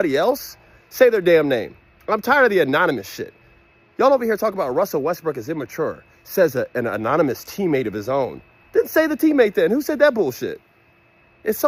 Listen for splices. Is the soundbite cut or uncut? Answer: uncut